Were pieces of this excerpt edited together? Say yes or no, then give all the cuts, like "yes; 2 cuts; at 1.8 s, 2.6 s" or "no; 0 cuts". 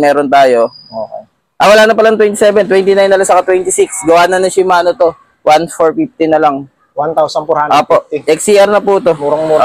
no; 0 cuts